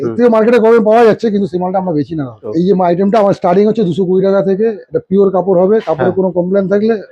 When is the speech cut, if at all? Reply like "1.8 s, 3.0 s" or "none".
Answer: 2.4 s